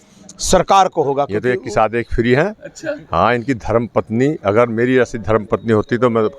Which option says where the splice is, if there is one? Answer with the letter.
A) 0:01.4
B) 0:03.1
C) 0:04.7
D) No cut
A